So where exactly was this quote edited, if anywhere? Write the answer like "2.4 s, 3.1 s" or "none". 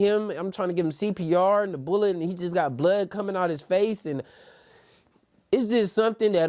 none